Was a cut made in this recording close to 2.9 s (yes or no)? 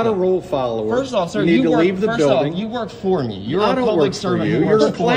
no